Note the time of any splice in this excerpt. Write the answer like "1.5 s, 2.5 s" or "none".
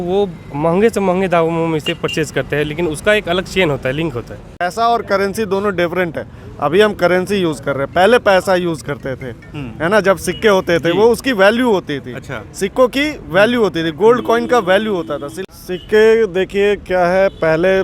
4.5 s, 15.3 s